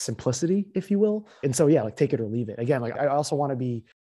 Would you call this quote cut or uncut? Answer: cut